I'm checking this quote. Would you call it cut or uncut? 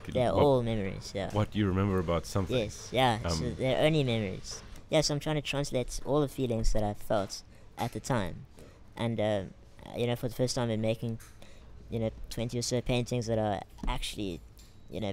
cut